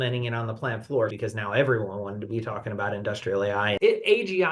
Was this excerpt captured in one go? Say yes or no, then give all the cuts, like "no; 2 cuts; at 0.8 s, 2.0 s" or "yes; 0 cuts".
no; 2 cuts; at 1.1 s, 3.7 s